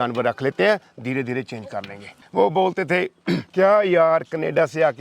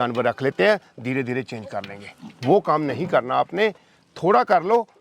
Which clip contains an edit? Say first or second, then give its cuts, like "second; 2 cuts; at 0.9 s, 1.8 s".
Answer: first; 1 cut; at 2.1 s